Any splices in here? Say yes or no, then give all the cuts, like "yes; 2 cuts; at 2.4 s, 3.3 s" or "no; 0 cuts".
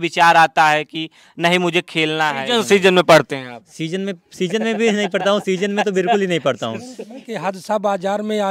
yes; 2 cuts; at 2.4 s, 7.3 s